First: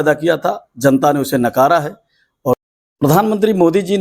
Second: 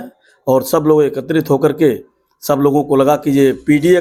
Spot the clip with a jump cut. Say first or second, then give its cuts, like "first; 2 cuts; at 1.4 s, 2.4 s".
first; 1 cut; at 2.6 s